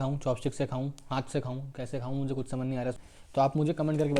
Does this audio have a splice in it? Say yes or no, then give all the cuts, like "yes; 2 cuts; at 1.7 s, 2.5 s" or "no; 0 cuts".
yes; 1 cut; at 3.0 s